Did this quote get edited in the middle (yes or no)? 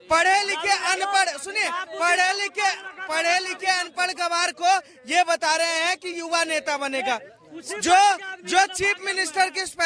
no